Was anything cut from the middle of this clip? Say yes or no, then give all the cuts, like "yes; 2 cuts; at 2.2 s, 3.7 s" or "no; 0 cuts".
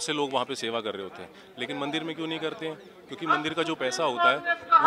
no; 0 cuts